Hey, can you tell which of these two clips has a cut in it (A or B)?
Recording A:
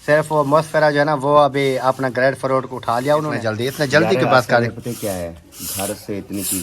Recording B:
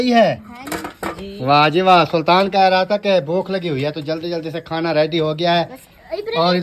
A